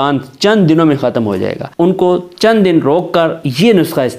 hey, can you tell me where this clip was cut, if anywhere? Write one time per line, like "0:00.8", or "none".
0:01.6